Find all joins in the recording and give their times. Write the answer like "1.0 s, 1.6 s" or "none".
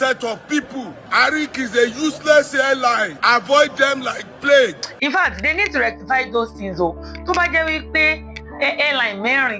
0.9 s, 3.1 s